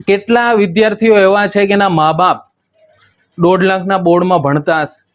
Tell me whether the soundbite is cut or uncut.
uncut